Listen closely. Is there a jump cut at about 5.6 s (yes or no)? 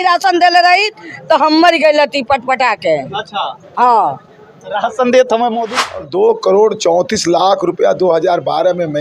yes